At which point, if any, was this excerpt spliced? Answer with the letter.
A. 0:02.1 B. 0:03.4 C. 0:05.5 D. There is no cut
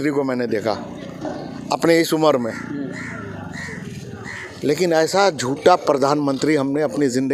D